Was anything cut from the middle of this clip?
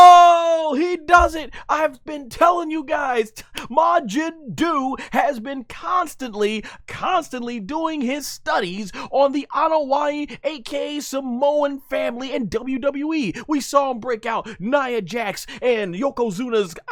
no; 0 cuts

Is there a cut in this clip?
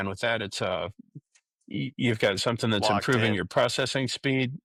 no; 0 cuts

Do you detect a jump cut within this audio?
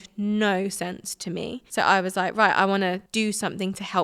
yes; 2 cuts; at 1.6 s, 3.0 s

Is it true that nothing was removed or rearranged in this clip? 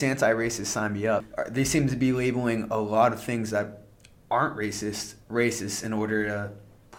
no; 1 cut; at 1.3 s

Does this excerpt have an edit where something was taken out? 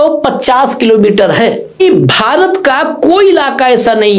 yes; 1 cut; at 1.8 s

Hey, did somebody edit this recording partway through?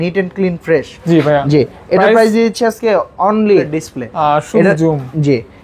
yes; 1 cut; at 3.8 s

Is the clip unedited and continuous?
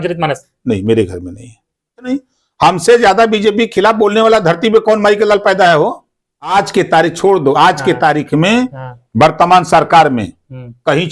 no; 2 cuts; at 2.1 s, 6.5 s

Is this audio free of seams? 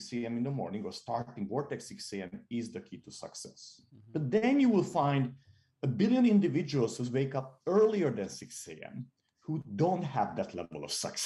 yes; 0 cuts

